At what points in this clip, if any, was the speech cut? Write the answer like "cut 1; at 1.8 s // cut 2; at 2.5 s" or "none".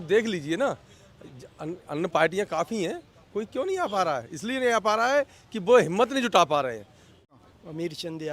cut 1; at 7.3 s